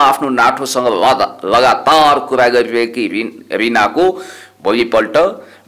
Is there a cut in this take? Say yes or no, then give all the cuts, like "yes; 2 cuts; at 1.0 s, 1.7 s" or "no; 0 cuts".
no; 0 cuts